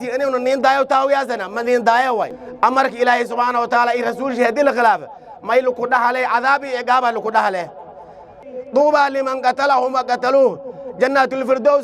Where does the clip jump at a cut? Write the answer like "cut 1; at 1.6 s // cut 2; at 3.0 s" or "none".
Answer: cut 1; at 2.4 s // cut 2; at 8.4 s